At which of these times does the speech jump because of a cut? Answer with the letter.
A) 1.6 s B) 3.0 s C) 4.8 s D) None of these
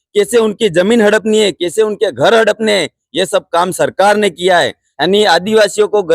C